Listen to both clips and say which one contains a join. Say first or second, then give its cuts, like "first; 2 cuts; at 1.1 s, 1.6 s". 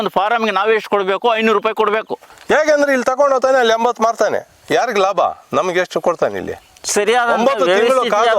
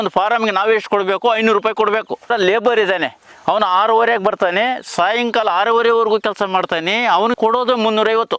first; 1 cut; at 2.2 s